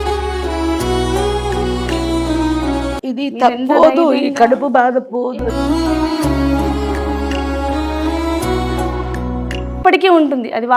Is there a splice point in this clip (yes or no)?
no